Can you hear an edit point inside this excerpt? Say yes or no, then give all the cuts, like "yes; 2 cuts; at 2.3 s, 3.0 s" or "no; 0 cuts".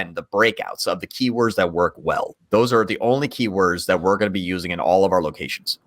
yes; 1 cut; at 2.4 s